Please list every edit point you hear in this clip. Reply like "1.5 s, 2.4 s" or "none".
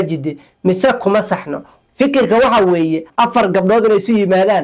3.1 s